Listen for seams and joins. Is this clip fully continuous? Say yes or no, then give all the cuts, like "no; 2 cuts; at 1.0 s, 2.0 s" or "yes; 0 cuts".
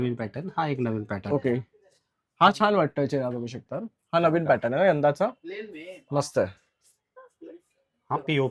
no; 1 cut; at 7.2 s